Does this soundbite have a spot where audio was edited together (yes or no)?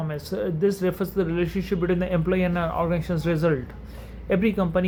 no